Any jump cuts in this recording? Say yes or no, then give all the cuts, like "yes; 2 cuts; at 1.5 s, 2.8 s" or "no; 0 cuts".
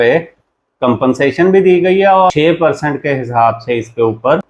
yes; 1 cut; at 2.3 s